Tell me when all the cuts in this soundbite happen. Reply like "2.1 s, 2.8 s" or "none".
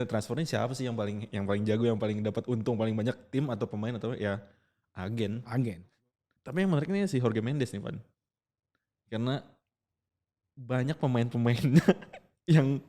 5.9 s

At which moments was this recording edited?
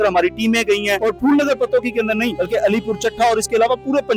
1.0 s, 2.3 s

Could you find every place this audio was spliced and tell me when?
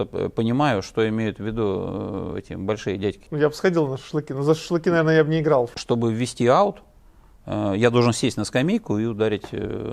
3.3 s, 5.8 s

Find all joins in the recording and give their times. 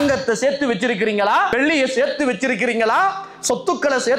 1.5 s

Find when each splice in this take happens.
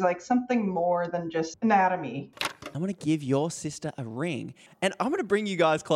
1.5 s, 2.3 s, 4.9 s

